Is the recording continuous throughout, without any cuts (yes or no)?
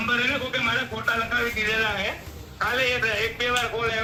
yes